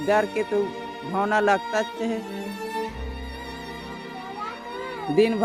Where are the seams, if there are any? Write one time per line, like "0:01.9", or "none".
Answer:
none